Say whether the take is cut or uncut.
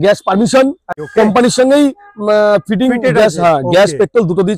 cut